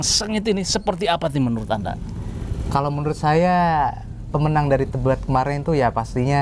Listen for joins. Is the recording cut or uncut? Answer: uncut